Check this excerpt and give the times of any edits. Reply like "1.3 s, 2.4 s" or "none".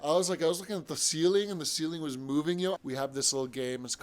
2.8 s